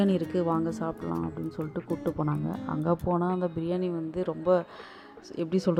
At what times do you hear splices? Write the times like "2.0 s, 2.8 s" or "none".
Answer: none